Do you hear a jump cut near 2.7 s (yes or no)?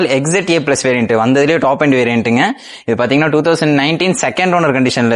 no